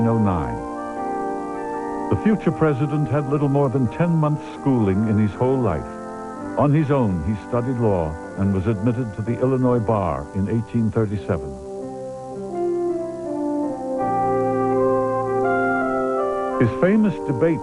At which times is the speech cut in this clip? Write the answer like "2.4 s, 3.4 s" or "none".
1.2 s